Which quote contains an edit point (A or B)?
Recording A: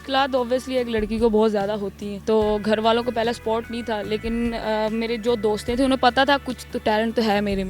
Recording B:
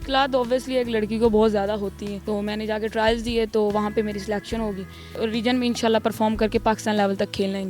B